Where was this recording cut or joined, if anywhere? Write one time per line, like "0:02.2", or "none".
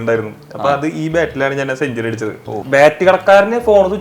0:02.6